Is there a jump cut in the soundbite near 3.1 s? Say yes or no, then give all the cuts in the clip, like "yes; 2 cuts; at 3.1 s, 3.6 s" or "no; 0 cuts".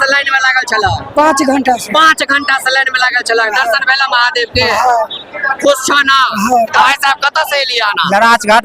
no; 1 cut; at 6.7 s